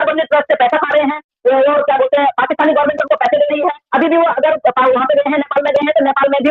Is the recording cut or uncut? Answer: uncut